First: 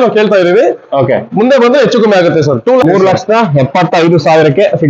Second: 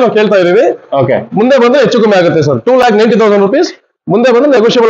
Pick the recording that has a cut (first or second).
first